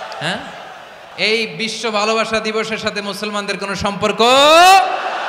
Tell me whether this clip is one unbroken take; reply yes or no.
no